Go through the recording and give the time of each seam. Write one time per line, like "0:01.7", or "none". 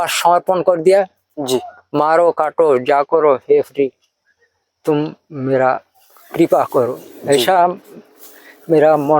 none